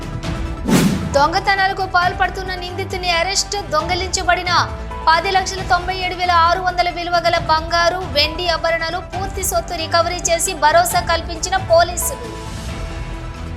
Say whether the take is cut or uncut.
cut